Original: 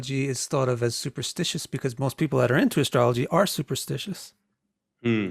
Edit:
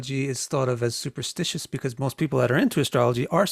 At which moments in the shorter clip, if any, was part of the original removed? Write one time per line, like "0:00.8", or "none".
none